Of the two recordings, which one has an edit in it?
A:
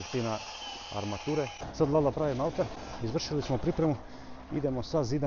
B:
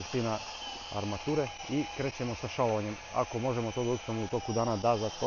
A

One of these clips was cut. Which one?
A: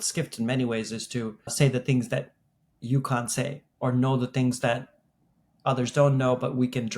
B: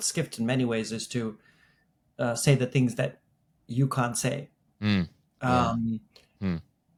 A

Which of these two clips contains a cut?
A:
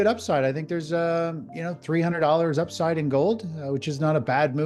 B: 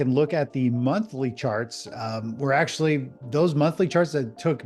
B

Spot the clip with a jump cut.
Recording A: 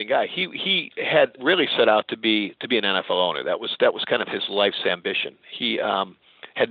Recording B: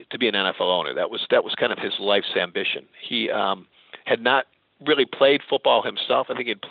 A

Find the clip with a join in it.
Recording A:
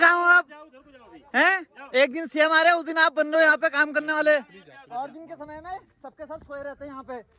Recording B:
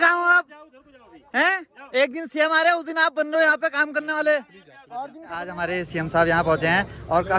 B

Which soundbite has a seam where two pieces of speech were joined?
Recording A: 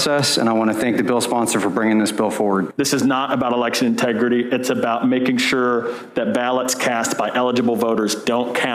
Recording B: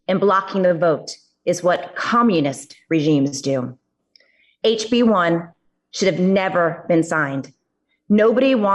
A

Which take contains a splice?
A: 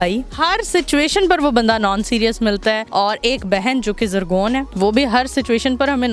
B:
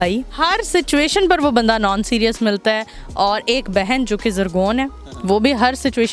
A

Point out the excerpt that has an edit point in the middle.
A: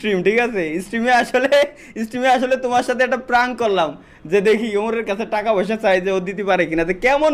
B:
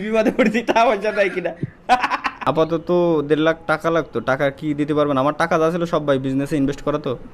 B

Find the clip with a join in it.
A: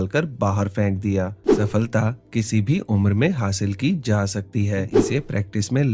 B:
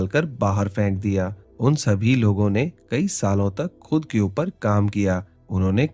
A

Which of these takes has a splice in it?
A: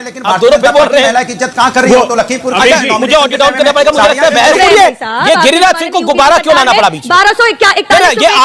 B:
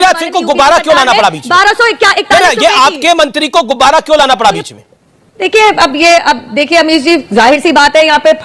A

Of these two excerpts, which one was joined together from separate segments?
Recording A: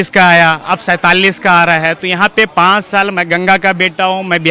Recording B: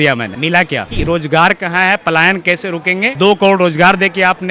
B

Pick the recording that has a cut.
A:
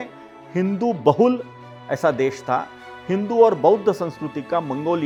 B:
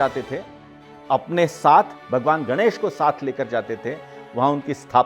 B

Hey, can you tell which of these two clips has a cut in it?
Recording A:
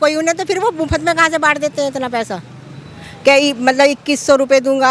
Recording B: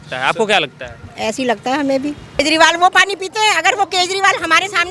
B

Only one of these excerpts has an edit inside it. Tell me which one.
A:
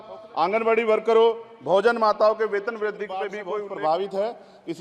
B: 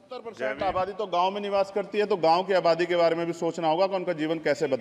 A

